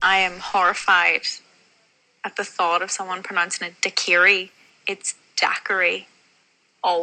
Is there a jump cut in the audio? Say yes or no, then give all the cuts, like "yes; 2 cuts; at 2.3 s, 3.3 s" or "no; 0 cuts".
no; 0 cuts